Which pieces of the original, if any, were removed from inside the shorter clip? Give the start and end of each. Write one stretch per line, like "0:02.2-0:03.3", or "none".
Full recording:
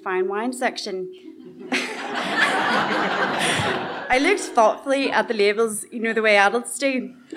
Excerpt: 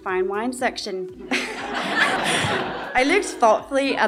0:01.2-0:01.6
0:02.6-0:03.3